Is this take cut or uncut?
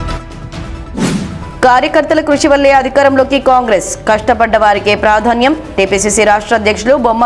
cut